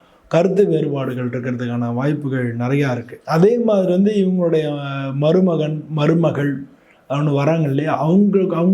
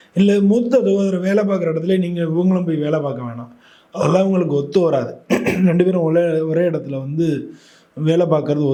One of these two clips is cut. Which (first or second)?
first